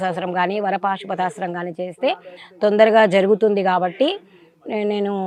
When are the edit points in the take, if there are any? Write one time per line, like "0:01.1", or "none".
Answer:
none